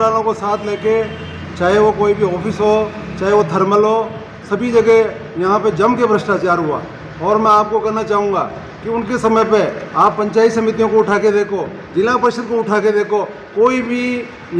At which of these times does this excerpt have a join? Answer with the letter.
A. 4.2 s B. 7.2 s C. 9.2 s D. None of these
D